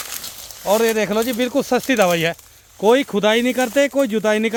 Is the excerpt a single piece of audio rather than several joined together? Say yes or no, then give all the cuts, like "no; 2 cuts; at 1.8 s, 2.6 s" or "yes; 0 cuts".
yes; 0 cuts